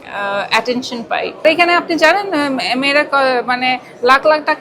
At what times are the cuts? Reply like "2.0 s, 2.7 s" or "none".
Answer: 1.4 s